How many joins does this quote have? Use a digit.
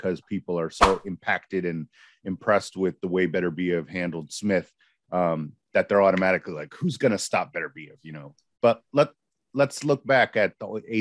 0